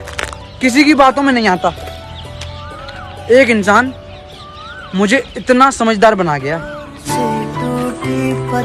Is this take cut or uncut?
uncut